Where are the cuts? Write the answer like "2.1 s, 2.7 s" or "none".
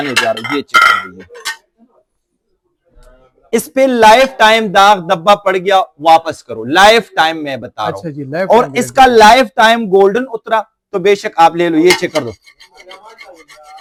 none